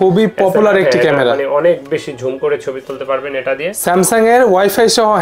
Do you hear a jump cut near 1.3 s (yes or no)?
no